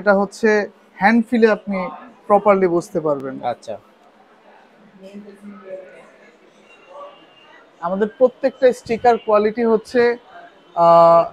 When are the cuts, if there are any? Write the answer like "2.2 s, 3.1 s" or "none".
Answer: none